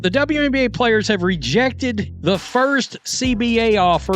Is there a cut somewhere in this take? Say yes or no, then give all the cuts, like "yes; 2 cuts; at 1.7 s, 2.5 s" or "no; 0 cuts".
yes; 1 cut; at 2.1 s